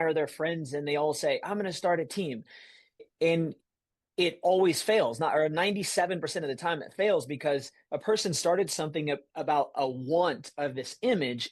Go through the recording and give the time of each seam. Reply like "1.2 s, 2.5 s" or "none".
3.0 s